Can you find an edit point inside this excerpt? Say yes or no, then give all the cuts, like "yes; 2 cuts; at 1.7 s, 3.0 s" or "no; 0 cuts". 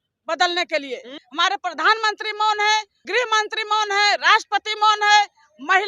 yes; 2 cuts; at 1.2 s, 3.1 s